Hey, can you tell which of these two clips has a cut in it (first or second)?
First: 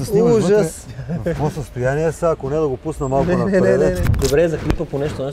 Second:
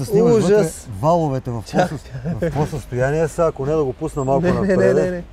first